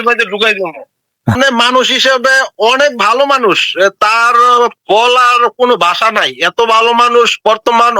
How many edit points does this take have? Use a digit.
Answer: 1